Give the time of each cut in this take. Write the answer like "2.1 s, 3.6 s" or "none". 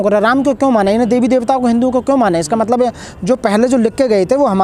none